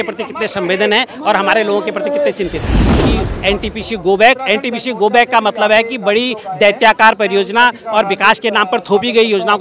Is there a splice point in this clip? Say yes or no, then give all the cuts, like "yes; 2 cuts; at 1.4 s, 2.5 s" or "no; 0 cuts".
yes; 1 cut; at 3.0 s